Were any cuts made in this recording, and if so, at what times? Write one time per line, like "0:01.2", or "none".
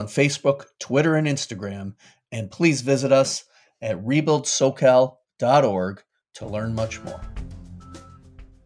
0:07.3